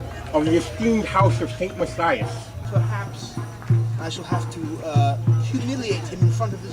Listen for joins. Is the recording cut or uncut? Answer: cut